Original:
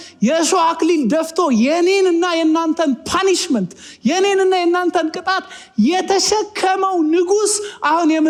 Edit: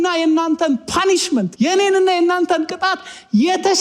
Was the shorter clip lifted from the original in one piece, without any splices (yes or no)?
no